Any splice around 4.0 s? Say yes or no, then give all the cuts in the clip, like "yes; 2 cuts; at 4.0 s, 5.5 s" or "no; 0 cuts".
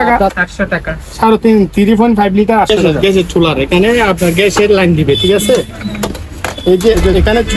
no; 1 cut; at 2.7 s